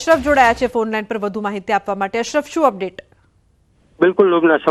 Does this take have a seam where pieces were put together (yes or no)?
no